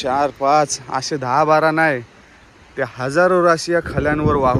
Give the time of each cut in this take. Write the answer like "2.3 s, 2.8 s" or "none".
none